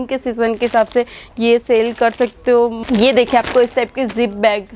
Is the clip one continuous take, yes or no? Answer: no